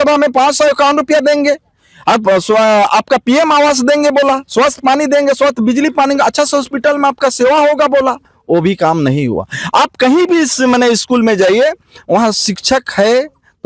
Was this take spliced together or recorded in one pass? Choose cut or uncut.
uncut